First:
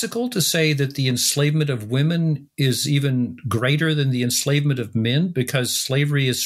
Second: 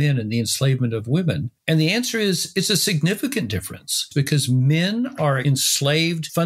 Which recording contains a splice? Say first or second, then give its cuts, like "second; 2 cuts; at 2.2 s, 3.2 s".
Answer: second; 1 cut; at 5.4 s